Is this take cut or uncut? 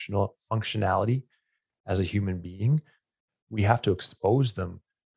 uncut